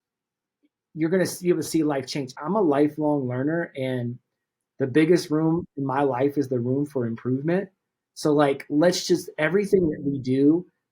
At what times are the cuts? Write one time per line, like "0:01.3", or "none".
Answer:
0:02.3